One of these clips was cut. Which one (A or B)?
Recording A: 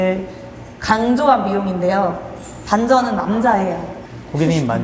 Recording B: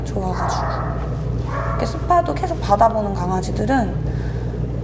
A